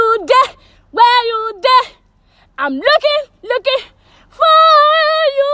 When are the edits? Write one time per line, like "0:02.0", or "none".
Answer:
none